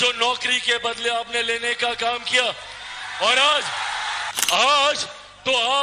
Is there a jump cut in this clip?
yes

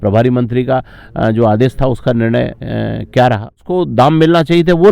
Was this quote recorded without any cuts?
no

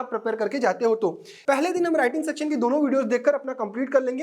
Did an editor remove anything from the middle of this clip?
yes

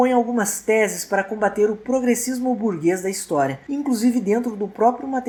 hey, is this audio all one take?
yes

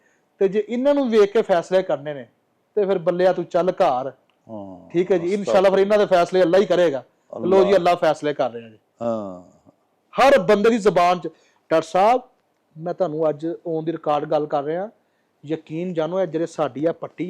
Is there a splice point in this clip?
no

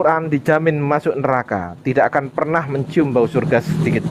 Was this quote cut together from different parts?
no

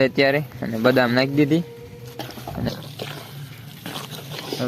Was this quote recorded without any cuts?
no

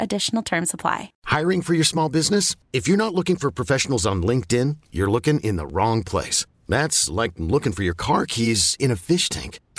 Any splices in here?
yes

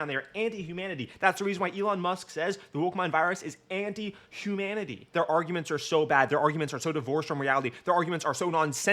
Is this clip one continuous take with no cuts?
no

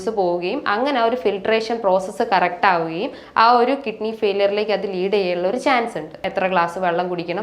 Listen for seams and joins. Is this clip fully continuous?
no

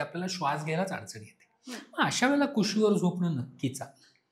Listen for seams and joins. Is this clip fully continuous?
yes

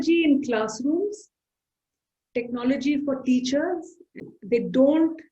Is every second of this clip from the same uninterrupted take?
no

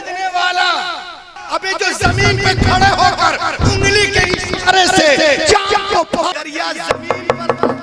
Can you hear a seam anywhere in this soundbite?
yes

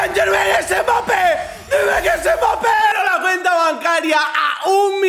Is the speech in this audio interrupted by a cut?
yes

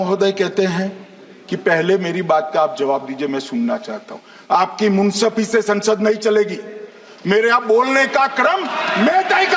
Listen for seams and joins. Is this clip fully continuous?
yes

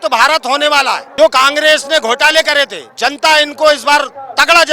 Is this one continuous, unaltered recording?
no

